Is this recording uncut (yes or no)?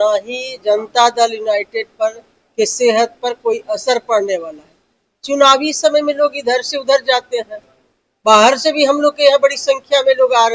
yes